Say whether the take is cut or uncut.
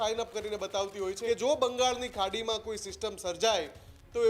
cut